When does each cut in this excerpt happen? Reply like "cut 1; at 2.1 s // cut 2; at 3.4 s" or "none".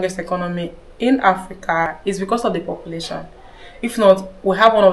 cut 1; at 1.9 s